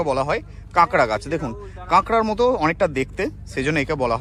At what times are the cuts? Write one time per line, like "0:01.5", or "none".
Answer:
none